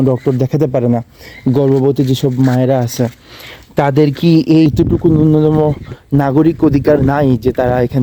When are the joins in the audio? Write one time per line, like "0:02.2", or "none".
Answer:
0:04.6